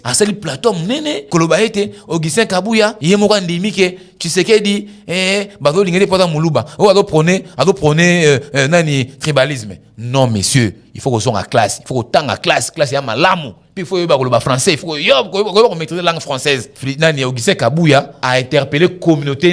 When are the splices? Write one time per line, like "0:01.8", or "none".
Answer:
0:01.2
0:03.0
0:16.8
0:18.1